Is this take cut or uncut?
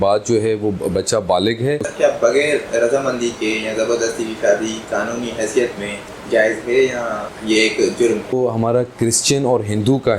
cut